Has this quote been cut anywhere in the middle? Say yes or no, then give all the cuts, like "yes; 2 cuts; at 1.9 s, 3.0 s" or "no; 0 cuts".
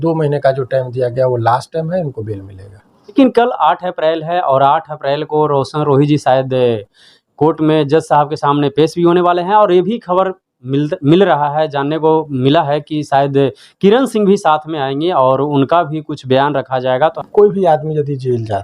yes; 2 cuts; at 3.1 s, 17.2 s